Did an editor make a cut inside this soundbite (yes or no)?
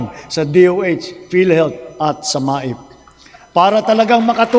no